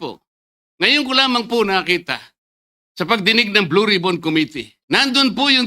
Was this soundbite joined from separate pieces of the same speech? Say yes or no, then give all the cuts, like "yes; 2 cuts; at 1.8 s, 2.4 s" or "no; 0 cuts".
yes; 1 cut; at 4.7 s